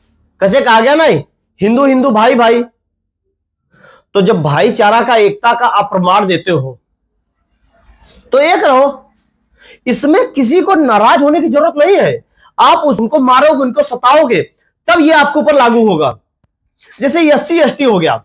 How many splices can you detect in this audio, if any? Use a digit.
1